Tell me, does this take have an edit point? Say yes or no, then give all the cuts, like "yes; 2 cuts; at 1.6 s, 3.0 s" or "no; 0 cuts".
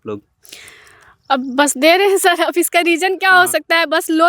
no; 0 cuts